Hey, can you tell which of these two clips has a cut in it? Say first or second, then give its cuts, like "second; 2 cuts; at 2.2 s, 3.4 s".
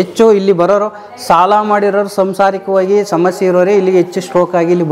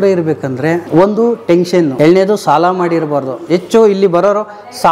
second; 2 cuts; at 0.8 s, 1.9 s